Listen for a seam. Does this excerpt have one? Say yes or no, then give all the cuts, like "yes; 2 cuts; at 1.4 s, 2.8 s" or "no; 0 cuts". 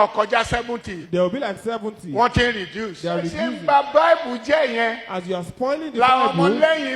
yes; 1 cut; at 3.4 s